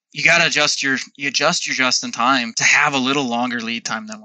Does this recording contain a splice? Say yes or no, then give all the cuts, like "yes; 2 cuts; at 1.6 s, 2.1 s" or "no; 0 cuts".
yes; 1 cut; at 2.6 s